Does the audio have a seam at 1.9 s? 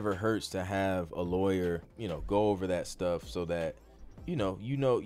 yes; 1 cut; at 1.9 s

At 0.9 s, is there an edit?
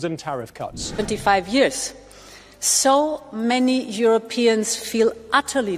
yes; 1 cut; at 0.9 s

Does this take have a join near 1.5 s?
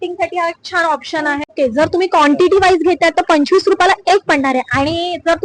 yes; 1 cut; at 1.5 s

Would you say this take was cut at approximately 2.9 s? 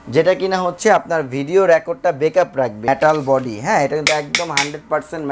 yes; 1 cut; at 2.9 s

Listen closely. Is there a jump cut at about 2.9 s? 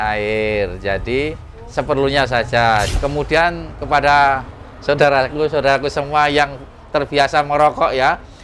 yes; 1 cut; at 2.9 s

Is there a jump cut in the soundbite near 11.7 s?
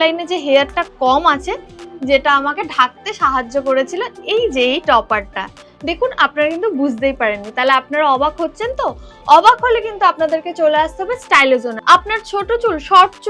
yes; 1 cut; at 11.7 s

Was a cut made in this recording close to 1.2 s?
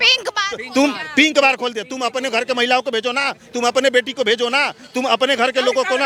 no; 0 cuts

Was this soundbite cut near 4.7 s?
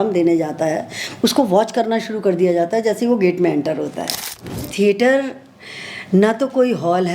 yes; 1 cut; at 4.7 s

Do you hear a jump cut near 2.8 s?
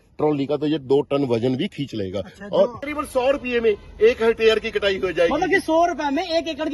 yes; 1 cut; at 2.8 s

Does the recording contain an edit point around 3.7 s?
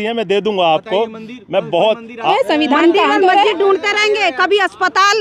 no; 1 cut; at 2.3 s

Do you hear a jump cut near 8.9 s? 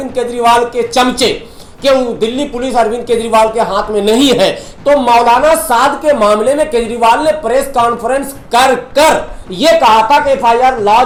no; 0 cuts

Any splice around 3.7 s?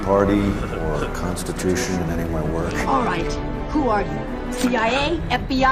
yes; 1 cut; at 3.7 s

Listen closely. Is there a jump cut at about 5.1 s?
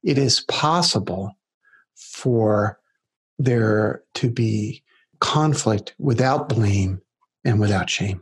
yes; 1 cut; at 5.1 s

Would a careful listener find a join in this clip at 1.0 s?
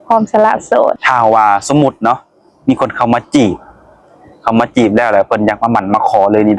yes; 1 cut; at 1.0 s

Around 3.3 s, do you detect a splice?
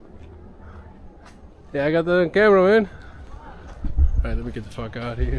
yes; 1 cut; at 3.3 s

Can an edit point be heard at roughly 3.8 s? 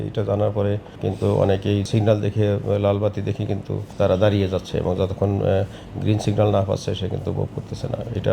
yes; 3 cuts; at 0.9 s, 1.9 s, 3.8 s

